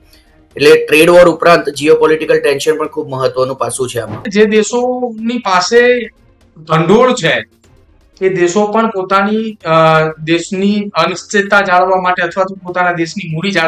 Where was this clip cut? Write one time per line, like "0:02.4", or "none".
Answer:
0:04.2